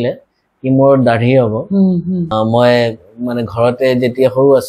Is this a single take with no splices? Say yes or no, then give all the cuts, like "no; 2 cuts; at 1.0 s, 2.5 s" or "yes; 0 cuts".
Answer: no; 1 cut; at 2.3 s